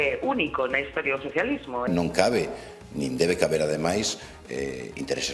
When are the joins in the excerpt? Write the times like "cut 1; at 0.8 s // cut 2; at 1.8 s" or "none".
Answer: cut 1; at 1.9 s